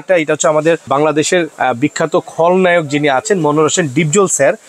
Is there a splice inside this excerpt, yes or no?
yes